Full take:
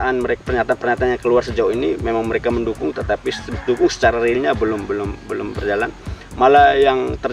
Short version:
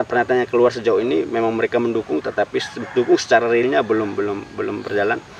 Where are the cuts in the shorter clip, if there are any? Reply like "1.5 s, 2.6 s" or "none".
none